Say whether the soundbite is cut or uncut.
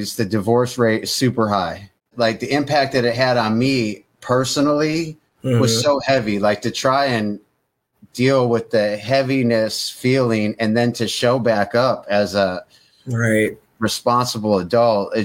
cut